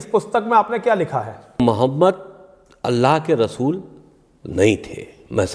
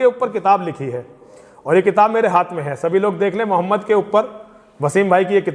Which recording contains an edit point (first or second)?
first